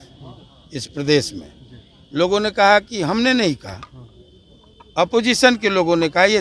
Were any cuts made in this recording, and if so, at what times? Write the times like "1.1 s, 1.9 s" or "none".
none

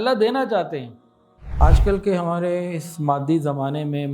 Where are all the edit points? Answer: 1.5 s

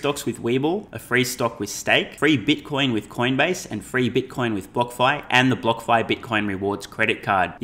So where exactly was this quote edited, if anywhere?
0.9 s, 2.1 s

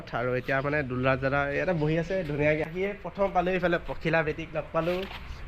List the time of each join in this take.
2.7 s

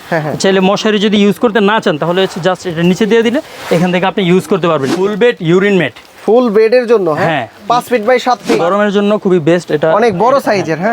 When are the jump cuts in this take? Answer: 4.9 s, 8.5 s

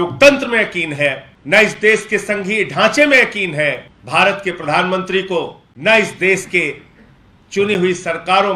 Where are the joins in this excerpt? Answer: 1.3 s, 3.9 s, 5.6 s

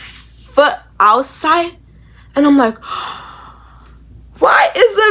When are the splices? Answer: none

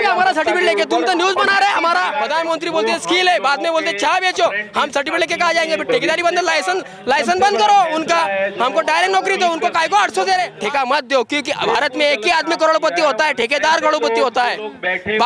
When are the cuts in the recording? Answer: 2.2 s, 10.5 s

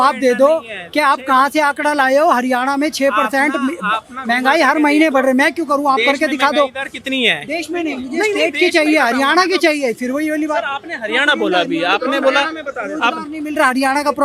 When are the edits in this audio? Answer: none

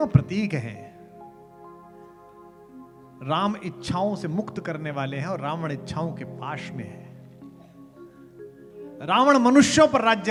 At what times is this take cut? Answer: none

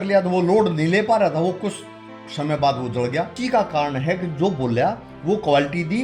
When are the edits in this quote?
3.3 s

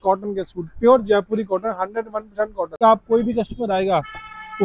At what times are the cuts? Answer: 2.8 s

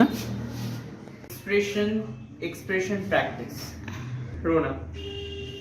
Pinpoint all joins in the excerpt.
4.2 s

